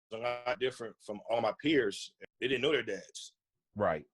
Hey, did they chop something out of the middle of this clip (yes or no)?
yes